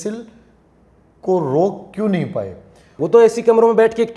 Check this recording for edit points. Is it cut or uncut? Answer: cut